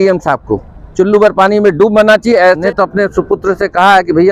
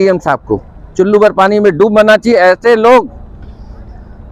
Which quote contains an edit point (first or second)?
first